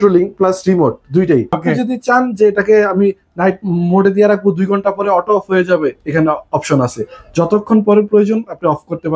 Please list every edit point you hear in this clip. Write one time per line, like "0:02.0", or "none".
0:01.6